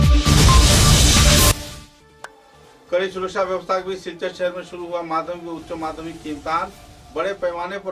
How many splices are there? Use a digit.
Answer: 0